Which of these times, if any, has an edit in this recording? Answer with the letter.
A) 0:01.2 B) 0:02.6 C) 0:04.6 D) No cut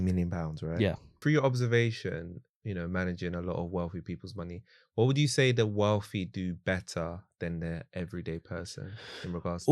A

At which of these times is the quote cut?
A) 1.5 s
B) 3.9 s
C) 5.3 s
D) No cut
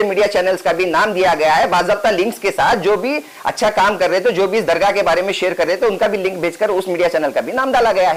D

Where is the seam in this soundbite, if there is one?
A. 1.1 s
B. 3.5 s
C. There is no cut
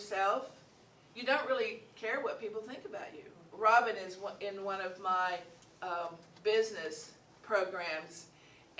B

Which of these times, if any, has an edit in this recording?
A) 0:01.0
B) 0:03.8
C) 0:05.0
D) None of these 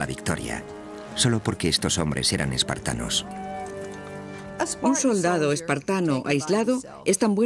B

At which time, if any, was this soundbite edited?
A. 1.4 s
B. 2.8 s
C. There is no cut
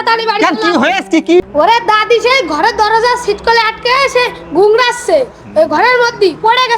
A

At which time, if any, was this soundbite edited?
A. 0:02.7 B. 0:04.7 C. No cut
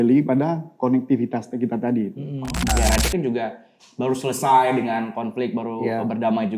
A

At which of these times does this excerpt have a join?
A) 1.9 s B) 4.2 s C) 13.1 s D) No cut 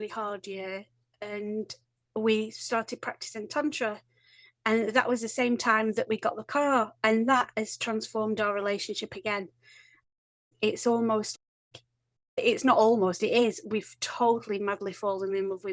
D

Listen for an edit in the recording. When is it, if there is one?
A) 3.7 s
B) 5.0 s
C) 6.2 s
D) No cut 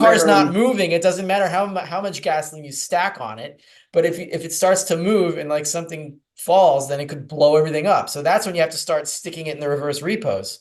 D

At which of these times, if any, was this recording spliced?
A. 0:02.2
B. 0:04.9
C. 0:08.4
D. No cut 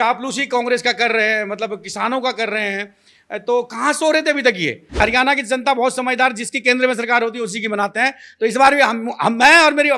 B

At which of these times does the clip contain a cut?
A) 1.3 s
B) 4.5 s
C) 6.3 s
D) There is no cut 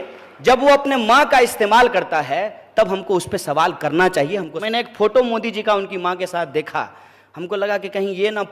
B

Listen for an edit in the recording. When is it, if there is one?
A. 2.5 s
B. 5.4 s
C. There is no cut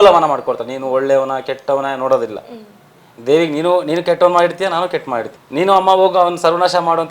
B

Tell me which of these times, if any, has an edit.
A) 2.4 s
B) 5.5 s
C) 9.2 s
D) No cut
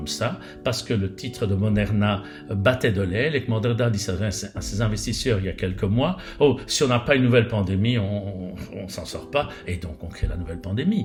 D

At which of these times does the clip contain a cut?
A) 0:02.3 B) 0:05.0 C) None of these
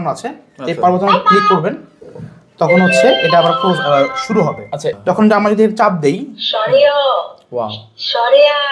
B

